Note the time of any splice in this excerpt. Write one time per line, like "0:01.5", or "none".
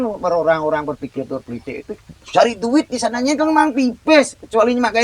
none